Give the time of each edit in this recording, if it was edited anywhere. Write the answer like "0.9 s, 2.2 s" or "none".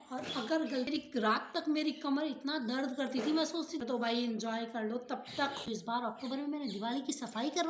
0.9 s, 3.7 s, 5.7 s